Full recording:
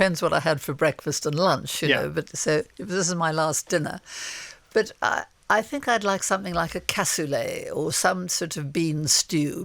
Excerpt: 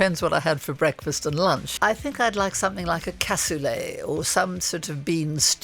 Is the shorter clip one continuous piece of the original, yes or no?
no